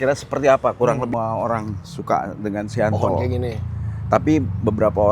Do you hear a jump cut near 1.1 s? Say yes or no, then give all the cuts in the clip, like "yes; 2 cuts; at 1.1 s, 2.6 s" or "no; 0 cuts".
yes; 1 cut; at 1.1 s